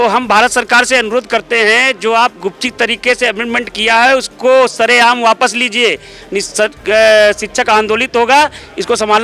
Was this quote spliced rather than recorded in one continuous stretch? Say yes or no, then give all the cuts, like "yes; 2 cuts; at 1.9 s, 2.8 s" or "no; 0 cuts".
no; 0 cuts